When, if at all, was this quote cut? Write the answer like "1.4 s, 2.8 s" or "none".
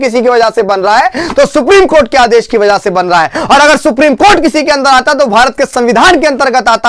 none